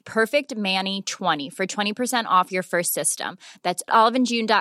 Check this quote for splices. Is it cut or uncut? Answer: cut